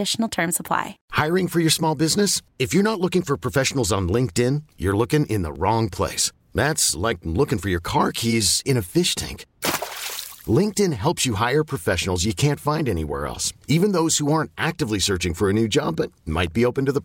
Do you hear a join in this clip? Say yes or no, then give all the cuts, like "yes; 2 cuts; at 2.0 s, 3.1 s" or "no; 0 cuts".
yes; 1 cut; at 1.0 s